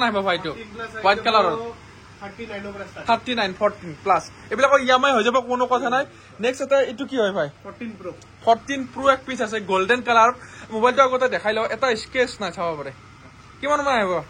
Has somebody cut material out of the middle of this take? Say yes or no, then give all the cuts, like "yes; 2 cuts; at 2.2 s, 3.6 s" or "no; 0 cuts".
no; 0 cuts